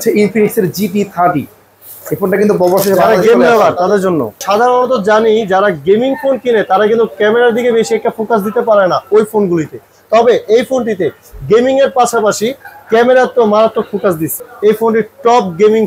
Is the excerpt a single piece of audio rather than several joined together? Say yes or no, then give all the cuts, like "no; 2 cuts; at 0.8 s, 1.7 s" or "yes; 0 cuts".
no; 2 cuts; at 4.3 s, 14.5 s